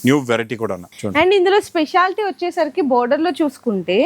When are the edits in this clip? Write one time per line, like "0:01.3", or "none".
0:00.9